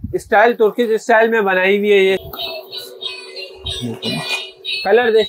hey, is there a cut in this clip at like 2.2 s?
yes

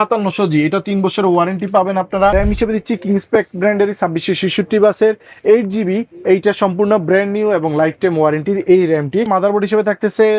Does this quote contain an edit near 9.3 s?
yes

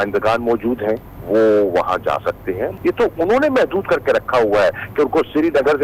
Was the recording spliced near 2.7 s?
yes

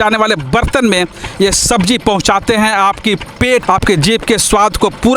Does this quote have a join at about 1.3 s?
no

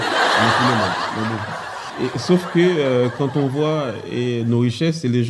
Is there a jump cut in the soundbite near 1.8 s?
yes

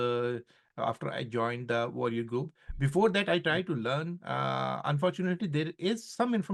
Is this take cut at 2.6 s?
no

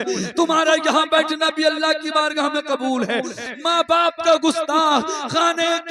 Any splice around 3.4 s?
yes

